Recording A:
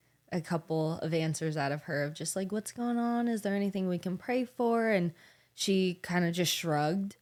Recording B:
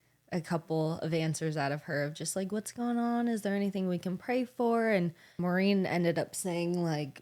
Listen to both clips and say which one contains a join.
B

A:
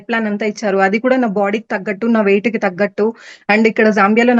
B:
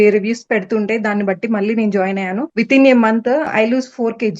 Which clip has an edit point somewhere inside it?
B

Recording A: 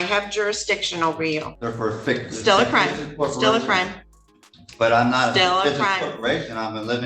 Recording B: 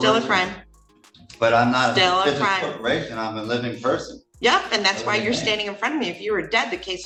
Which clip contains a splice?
A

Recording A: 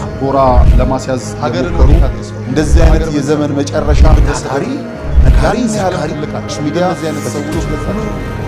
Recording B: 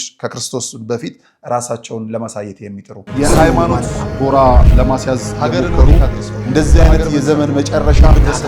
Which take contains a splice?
B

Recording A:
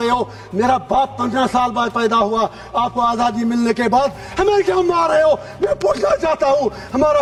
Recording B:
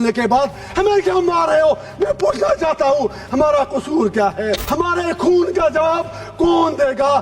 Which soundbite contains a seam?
B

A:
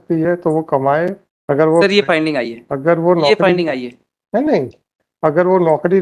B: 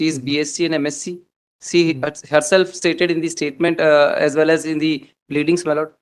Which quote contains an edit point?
A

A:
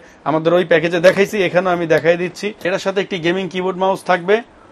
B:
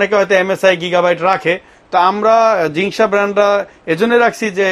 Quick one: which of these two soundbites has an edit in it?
A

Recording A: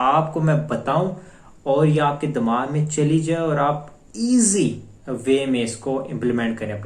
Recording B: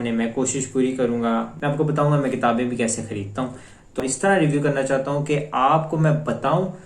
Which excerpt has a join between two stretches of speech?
B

